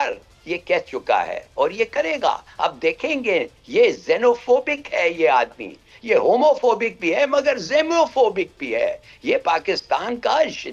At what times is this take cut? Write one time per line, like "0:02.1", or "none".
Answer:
none